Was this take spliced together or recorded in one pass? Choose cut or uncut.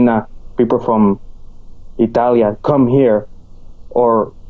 uncut